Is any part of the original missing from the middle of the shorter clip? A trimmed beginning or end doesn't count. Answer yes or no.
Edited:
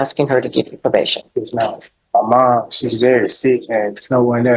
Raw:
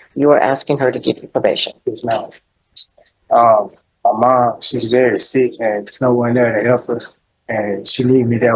yes